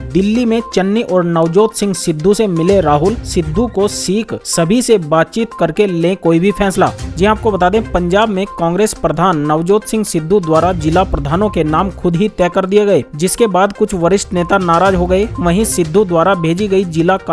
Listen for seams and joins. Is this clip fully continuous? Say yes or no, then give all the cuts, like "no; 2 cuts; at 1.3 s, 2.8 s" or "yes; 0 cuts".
yes; 0 cuts